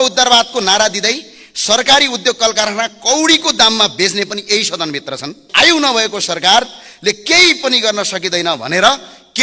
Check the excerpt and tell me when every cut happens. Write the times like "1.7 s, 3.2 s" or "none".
5.7 s